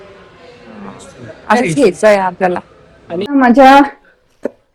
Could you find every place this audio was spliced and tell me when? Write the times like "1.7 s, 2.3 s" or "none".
3.3 s